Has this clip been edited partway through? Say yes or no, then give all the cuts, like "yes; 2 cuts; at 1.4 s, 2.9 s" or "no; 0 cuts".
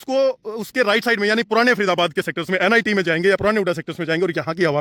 no; 0 cuts